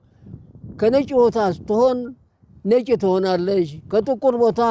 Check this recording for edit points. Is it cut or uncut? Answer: uncut